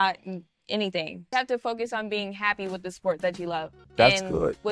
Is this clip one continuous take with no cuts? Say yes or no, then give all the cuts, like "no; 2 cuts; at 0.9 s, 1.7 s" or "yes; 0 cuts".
no; 1 cut; at 1.2 s